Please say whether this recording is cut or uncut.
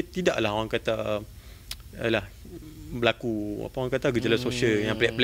uncut